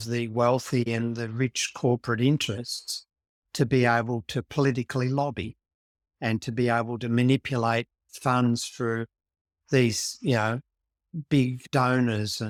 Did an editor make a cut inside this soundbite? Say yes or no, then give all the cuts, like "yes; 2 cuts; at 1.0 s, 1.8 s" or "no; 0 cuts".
no; 0 cuts